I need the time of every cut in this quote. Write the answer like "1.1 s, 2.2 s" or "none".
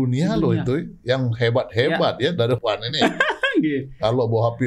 2.6 s